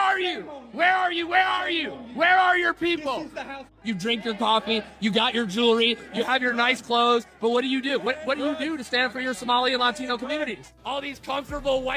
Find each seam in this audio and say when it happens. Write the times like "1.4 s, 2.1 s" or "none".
3.6 s, 10.7 s